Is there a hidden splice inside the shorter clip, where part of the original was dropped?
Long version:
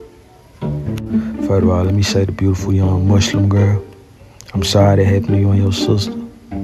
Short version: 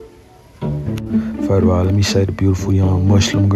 no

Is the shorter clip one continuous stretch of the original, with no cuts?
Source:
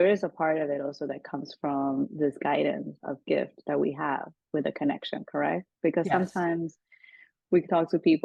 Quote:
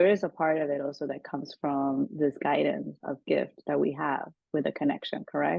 yes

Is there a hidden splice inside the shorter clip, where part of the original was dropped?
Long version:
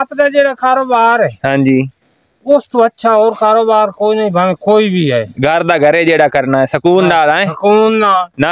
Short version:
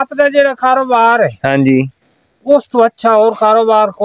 no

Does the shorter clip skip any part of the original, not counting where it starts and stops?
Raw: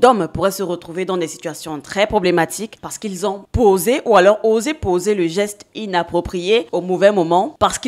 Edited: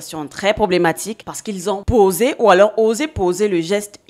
yes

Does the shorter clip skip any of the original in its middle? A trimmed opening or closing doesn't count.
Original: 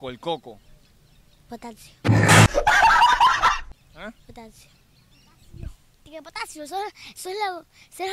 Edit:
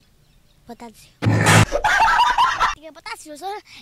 yes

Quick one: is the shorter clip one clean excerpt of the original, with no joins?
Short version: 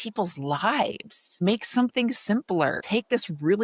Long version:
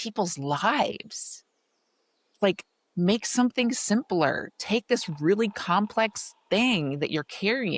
no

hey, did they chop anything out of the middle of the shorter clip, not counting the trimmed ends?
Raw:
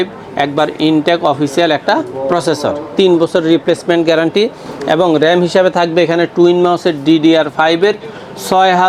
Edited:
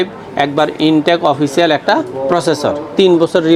no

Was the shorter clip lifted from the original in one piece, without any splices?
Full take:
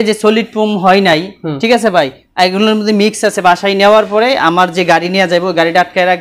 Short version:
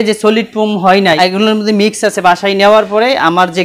no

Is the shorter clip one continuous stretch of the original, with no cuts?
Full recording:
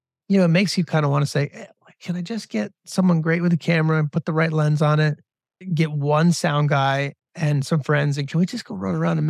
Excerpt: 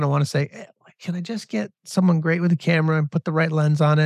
yes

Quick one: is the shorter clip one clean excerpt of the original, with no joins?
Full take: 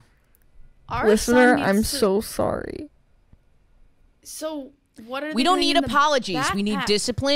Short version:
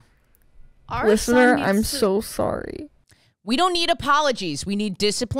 no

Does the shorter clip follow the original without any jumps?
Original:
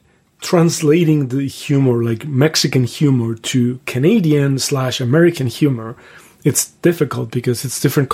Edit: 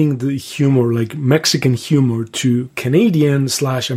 yes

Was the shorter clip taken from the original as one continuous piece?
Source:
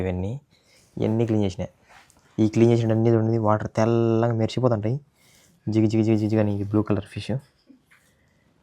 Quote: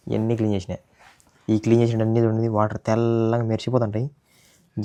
yes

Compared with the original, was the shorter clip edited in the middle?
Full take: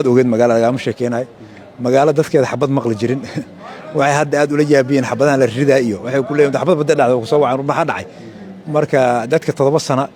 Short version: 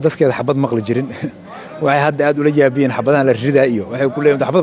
no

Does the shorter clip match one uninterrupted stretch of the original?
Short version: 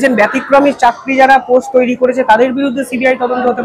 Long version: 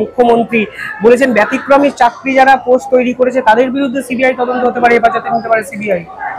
yes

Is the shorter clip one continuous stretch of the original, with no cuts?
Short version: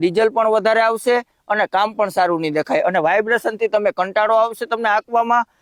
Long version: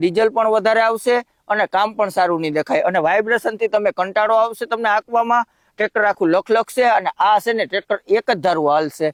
yes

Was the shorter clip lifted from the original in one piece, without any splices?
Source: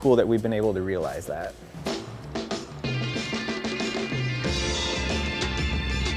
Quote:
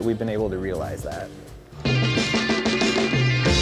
no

